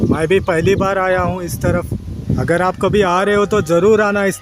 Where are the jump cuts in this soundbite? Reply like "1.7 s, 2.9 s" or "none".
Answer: 2.3 s